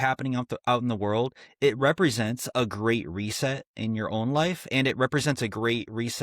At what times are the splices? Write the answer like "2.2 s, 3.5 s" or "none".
none